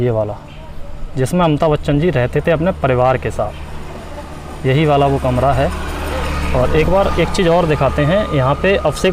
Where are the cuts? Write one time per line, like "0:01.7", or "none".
none